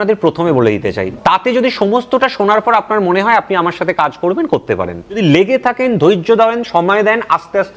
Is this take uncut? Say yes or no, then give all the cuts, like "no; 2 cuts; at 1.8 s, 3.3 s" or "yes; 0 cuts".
no; 2 cuts; at 1.1 s, 5.2 s